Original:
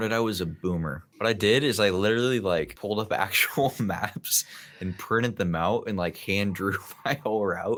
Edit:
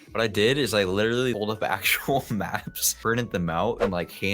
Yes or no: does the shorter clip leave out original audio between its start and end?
yes